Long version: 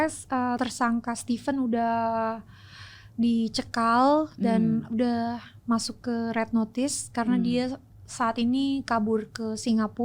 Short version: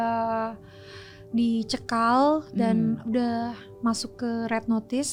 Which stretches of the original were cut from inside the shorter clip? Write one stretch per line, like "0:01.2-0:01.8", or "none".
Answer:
none

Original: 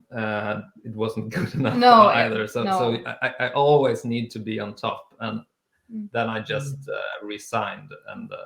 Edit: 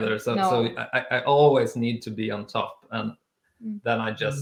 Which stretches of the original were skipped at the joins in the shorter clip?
none

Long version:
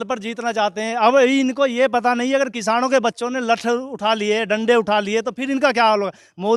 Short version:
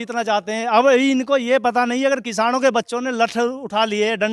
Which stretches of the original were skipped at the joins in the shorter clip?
none

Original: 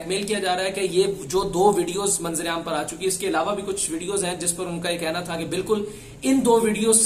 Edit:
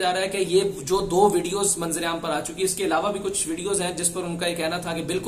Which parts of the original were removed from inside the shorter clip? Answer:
none

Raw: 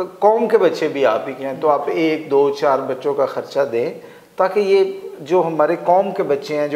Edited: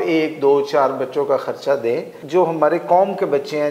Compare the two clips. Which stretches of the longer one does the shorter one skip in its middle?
0:04.0-0:05.1

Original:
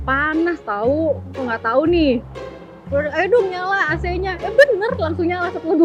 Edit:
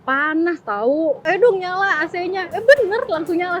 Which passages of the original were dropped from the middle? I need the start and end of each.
0:01.2-0:03.1

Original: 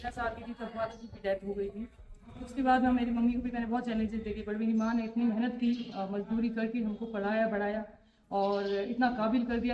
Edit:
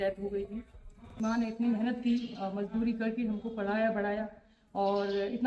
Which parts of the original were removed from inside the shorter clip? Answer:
0:02.4-0:04.8

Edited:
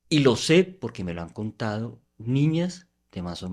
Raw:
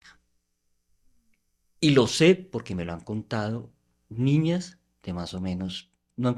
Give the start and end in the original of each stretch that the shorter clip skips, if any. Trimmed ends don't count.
0:03.8-0:04.0

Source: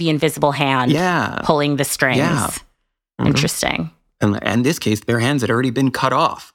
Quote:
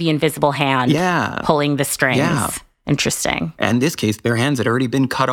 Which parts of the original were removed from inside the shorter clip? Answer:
0:03.1-0:03.9

